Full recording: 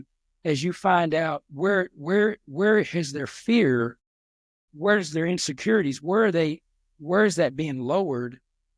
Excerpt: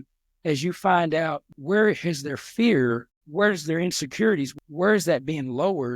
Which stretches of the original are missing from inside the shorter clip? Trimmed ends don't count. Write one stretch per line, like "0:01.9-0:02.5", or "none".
0:01.5-0:02.4
0:04.0-0:04.6
0:06.0-0:06.8